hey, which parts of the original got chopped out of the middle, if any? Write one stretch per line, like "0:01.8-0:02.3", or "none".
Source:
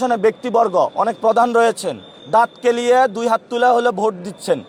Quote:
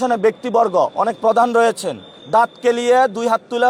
none